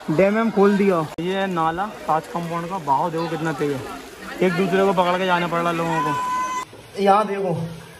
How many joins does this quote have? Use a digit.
2